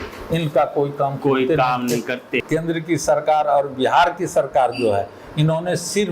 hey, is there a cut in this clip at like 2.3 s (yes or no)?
yes